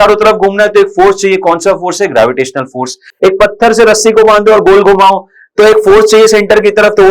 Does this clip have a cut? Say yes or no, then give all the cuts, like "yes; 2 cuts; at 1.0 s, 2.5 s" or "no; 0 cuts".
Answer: no; 0 cuts